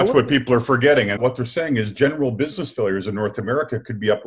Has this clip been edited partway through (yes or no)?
yes